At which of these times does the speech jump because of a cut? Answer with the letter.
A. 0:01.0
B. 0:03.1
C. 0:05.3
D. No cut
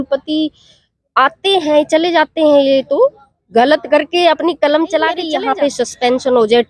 C